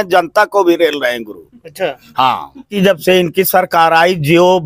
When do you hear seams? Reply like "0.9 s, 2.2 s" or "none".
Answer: 2.7 s